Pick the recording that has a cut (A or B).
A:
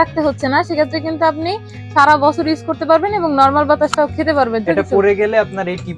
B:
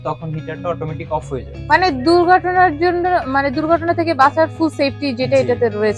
A